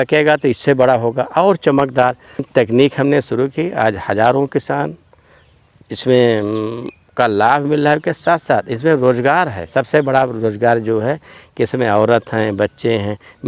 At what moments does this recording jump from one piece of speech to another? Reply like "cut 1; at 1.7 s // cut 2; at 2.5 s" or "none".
cut 1; at 2.5 s